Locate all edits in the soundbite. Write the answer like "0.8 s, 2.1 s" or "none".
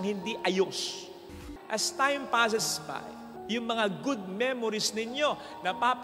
1.3 s